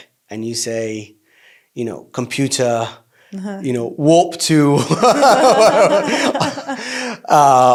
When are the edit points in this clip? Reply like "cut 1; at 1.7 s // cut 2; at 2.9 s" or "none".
none